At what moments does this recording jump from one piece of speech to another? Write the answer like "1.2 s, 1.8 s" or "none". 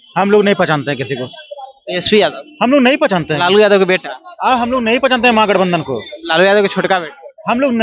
none